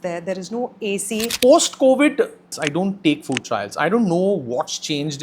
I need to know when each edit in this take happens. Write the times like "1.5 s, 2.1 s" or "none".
1.3 s, 2.5 s